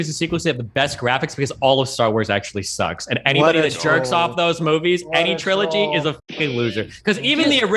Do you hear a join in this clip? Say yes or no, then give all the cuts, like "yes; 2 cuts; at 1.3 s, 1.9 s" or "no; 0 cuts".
no; 0 cuts